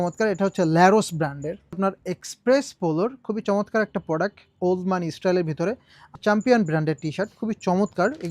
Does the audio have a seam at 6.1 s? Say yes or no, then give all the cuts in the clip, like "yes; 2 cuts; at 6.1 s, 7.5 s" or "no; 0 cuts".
yes; 2 cuts; at 1.8 s, 6.1 s